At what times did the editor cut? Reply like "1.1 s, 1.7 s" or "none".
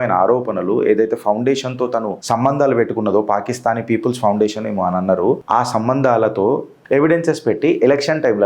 5.4 s, 6.8 s